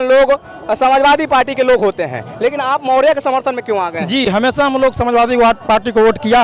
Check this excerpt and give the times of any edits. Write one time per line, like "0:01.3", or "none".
none